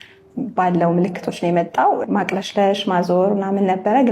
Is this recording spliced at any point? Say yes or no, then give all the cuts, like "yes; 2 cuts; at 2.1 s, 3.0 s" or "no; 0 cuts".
yes; 1 cut; at 2.0 s